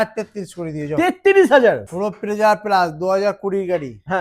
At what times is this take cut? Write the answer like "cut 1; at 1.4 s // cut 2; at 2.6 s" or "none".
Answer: cut 1; at 1.9 s